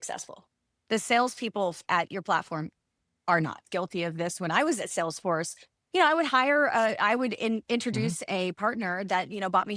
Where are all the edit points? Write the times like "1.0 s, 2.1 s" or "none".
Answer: 3.6 s